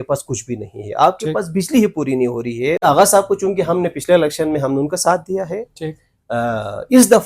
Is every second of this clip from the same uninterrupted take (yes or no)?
no